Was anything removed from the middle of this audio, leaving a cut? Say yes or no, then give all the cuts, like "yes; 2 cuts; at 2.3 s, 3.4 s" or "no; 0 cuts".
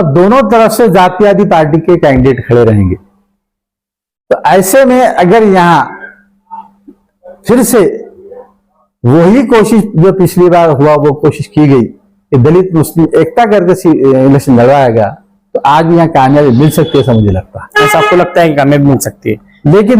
no; 0 cuts